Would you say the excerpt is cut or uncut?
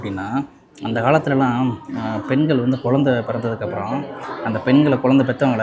uncut